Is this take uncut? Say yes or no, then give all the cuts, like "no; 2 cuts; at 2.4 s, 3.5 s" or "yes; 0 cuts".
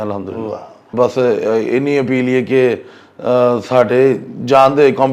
no; 1 cut; at 0.9 s